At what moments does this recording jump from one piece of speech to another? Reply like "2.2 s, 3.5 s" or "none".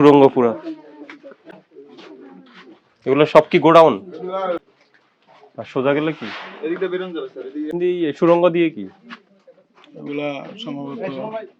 4.6 s, 7.7 s